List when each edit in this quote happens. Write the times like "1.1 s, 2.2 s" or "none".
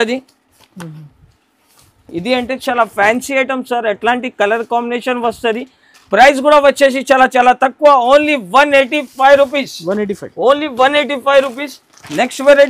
none